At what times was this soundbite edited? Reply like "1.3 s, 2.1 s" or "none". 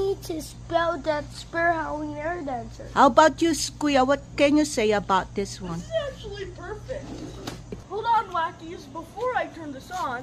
7.8 s